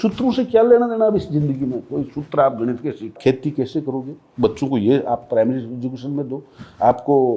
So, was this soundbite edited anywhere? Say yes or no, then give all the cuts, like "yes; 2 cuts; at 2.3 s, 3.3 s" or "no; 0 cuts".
yes; 1 cut; at 3.2 s